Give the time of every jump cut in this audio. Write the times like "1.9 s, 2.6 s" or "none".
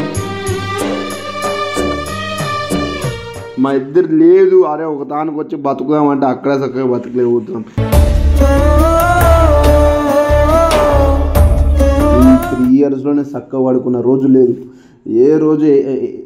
3.4 s, 12.1 s